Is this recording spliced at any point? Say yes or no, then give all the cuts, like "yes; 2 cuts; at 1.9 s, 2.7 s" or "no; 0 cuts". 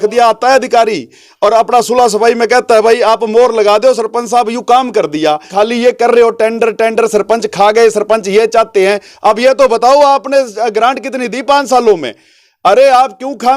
yes; 1 cut; at 5.5 s